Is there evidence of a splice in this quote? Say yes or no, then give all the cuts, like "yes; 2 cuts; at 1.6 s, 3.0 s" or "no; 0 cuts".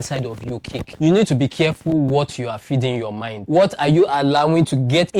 yes; 1 cut; at 0.9 s